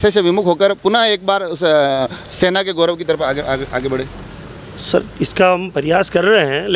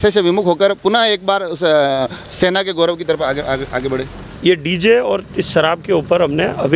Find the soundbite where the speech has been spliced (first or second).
second